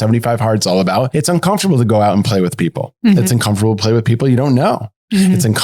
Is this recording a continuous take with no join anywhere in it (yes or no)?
no